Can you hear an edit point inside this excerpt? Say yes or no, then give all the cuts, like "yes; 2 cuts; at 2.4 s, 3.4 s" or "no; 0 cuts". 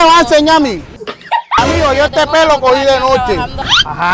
yes; 1 cut; at 1.6 s